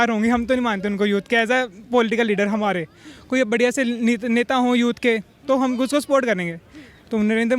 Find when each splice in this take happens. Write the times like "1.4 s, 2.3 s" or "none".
none